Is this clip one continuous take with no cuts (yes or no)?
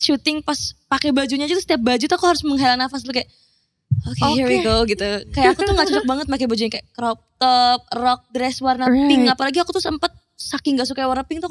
yes